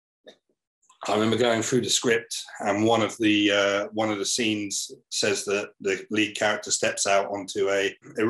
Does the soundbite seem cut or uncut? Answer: uncut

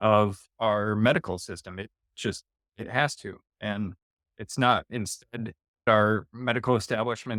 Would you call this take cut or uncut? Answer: uncut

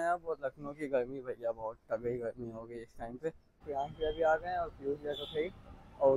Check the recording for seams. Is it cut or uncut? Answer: cut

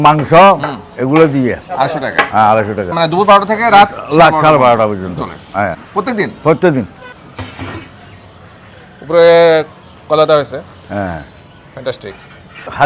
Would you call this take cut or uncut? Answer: uncut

